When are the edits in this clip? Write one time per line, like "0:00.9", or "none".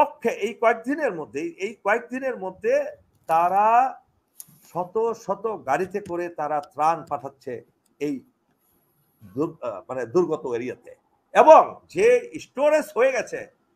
none